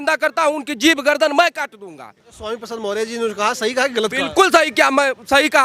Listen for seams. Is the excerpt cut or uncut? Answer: cut